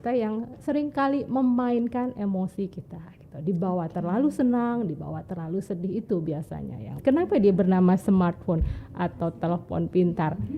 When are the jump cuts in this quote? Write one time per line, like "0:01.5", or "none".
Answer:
0:06.9